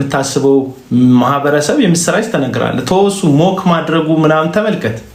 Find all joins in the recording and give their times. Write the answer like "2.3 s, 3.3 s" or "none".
none